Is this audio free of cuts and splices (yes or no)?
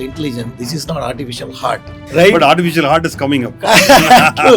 no